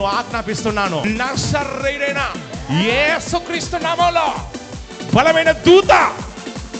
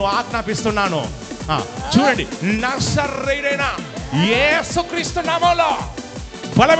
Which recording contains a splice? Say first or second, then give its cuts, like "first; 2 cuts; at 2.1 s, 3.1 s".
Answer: first; 1 cut; at 1.0 s